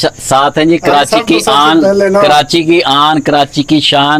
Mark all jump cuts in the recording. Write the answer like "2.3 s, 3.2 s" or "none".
none